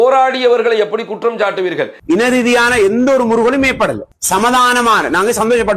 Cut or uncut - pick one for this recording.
cut